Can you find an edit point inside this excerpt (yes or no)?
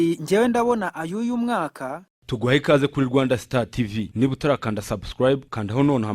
yes